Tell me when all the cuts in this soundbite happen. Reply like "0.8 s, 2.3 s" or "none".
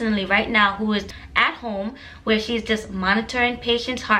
1.1 s

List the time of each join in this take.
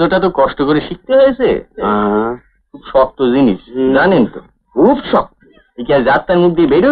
none

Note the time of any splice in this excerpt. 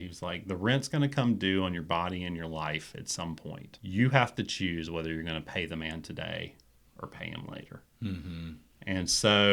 3.7 s

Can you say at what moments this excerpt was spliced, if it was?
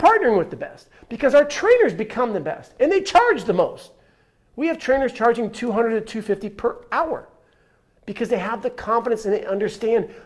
none

